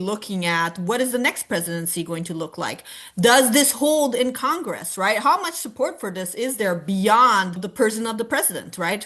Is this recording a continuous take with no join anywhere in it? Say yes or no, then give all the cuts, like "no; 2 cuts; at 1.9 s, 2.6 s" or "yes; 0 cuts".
no; 1 cut; at 7.6 s